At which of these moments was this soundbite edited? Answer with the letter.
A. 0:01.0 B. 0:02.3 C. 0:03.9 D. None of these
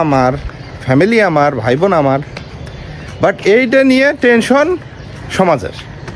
D